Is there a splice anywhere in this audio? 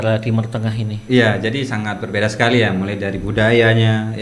no; 0 cuts

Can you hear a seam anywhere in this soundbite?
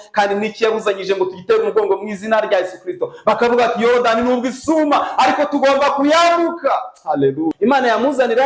yes; 1 cut; at 7.5 s

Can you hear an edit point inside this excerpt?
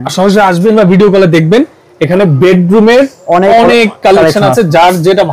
no; 0 cuts

